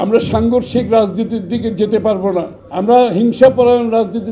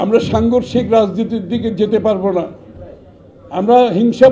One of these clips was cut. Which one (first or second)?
first